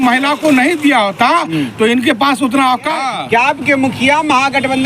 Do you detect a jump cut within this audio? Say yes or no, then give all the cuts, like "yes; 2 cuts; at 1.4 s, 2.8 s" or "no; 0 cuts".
yes; 1 cut; at 3.0 s